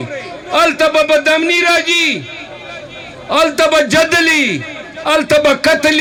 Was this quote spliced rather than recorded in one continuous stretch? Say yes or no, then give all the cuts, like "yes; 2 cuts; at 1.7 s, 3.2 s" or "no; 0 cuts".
no; 0 cuts